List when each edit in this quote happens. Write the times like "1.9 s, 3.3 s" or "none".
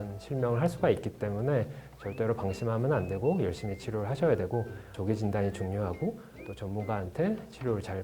4.8 s